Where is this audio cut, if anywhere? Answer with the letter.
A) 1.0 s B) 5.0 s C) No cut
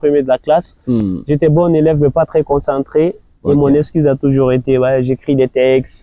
C